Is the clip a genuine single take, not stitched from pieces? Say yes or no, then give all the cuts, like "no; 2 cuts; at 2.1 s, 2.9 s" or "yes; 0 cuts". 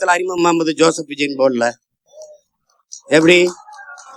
yes; 0 cuts